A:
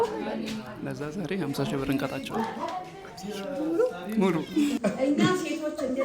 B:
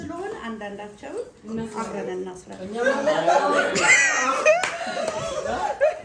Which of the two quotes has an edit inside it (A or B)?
A